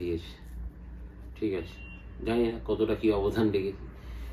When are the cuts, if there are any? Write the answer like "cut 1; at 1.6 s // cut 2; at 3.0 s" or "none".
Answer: none